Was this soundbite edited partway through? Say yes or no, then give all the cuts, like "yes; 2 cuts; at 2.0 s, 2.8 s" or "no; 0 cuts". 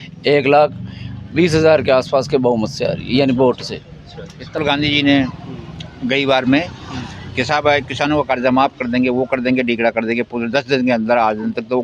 yes; 1 cut; at 4.6 s